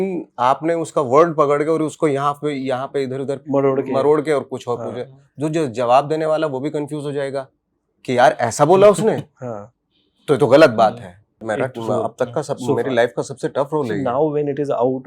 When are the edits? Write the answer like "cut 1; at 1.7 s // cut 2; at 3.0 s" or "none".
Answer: cut 1; at 11.4 s